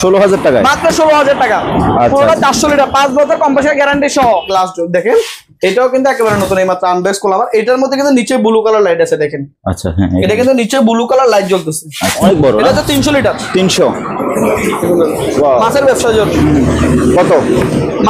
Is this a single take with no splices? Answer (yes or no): no